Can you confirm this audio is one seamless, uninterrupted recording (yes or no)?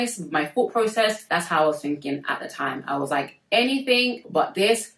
yes